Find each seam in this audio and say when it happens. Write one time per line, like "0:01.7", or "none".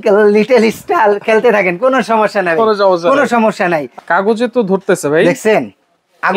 0:03.9